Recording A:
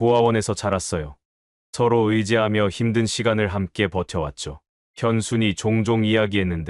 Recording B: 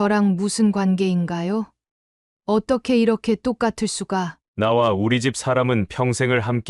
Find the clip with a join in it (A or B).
B